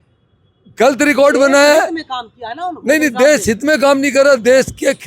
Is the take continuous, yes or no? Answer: yes